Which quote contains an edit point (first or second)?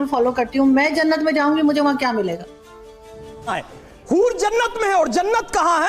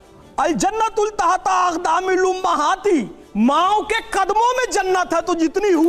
first